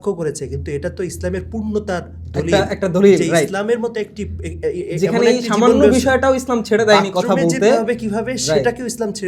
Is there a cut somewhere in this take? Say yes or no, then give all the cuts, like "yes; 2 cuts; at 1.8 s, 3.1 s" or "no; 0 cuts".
no; 0 cuts